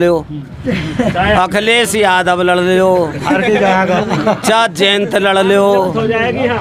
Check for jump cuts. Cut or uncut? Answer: uncut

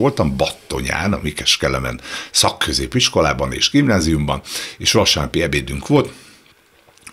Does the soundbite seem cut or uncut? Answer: uncut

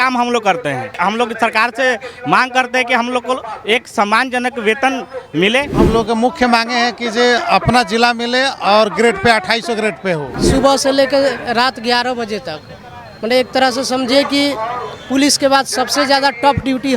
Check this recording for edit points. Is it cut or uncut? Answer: cut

